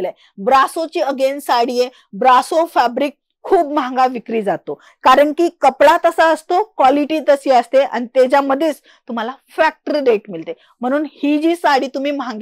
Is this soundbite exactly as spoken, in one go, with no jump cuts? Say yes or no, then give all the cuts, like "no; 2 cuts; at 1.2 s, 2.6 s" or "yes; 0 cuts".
yes; 0 cuts